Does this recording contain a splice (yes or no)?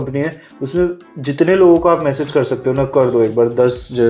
no